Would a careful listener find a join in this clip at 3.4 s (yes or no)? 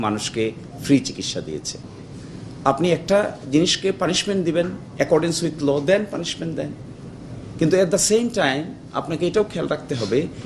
no